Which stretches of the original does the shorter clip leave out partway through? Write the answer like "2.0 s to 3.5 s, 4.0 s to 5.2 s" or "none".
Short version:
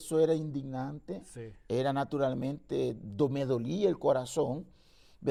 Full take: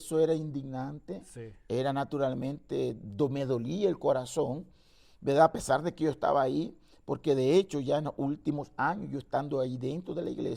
none